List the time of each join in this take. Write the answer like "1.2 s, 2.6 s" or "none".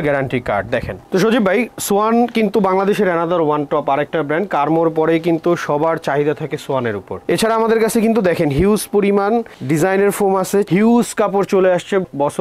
0.9 s, 7.1 s, 10.7 s